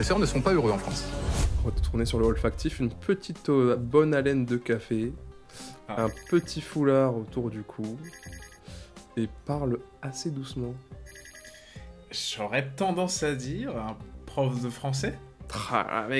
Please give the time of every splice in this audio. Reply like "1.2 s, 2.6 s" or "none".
1.5 s